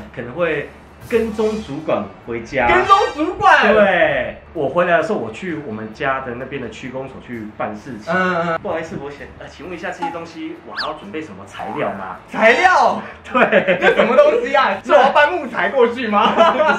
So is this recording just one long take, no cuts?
no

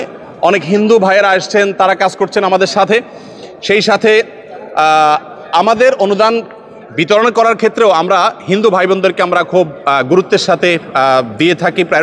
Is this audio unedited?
yes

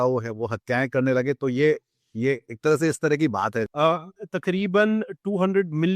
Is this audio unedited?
no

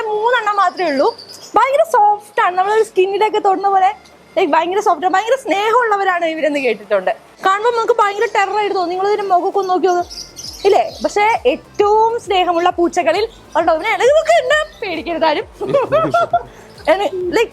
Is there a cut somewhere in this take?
no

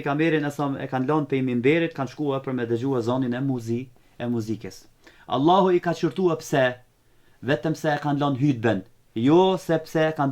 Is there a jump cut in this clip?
no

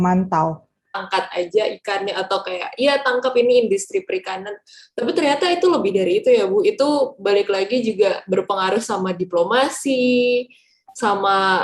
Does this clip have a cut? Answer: yes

